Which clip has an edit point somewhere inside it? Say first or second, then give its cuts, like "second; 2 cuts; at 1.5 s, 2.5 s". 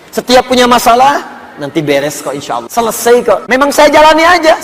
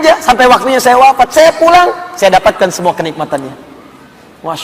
first; 2 cuts; at 2.7 s, 3.4 s